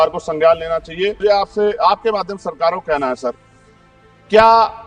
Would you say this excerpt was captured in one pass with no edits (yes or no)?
no